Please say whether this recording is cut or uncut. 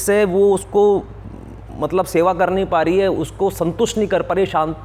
uncut